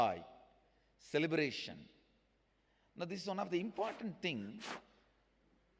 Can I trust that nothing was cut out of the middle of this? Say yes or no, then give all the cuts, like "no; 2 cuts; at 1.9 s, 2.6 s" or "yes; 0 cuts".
no; 1 cut; at 4.8 s